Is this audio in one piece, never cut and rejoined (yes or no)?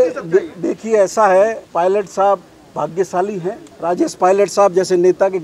no